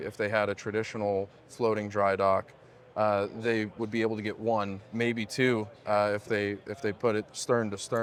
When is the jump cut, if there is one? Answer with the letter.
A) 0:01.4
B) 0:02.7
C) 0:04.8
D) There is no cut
D